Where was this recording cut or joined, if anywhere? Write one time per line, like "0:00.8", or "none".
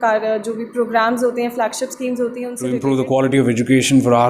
0:02.6